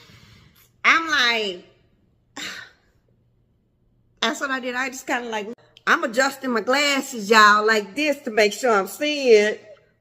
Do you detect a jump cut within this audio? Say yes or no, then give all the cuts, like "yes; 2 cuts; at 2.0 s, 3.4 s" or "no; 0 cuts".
yes; 1 cut; at 5.5 s